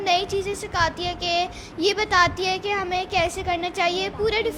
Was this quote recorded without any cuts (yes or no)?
yes